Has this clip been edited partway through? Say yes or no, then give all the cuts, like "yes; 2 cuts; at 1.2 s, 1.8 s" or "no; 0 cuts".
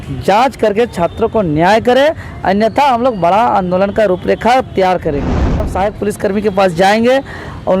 yes; 1 cut; at 5.7 s